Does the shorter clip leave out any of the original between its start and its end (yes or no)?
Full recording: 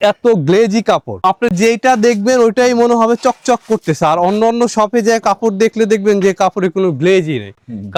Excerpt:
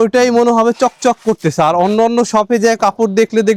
no